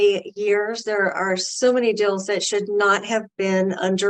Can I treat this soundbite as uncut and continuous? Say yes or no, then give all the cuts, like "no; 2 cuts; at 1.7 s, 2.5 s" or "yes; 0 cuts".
yes; 0 cuts